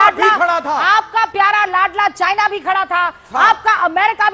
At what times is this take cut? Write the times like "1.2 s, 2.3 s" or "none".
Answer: 3.2 s